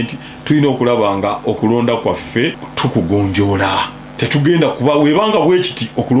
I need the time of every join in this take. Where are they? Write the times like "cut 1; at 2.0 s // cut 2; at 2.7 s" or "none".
cut 1; at 2.6 s // cut 2; at 4.0 s